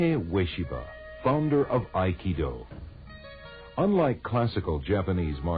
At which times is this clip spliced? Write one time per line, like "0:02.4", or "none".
0:03.4